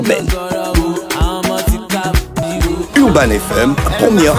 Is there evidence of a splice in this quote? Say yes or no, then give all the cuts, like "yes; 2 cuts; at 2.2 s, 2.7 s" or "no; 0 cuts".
no; 0 cuts